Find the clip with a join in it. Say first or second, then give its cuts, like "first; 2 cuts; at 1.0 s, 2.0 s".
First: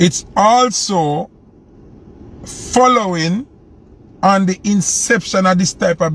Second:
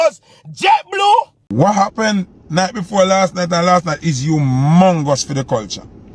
second; 1 cut; at 1.4 s